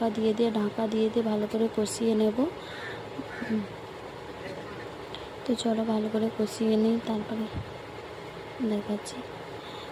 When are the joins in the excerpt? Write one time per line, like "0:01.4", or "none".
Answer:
0:08.7